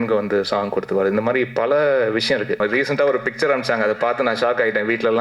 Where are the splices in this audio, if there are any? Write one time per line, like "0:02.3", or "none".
0:02.6